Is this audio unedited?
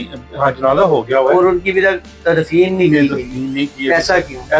yes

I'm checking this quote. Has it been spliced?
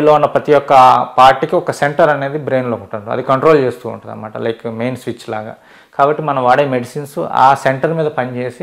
no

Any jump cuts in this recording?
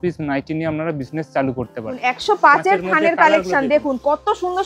yes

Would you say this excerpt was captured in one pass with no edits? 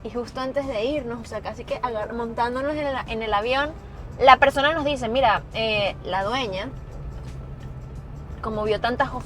yes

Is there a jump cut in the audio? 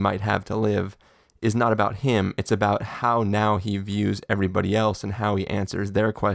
no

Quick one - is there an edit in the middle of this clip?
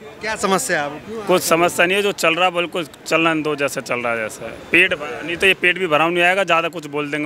no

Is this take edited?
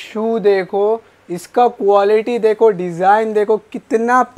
no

